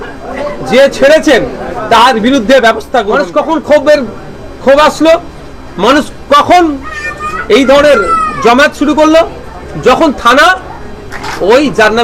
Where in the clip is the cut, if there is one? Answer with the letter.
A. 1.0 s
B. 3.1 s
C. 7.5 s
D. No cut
B